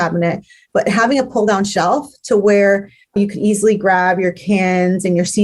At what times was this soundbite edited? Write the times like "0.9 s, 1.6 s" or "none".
3.2 s